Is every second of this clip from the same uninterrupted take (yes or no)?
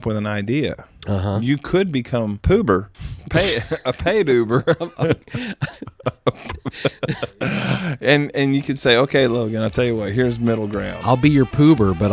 yes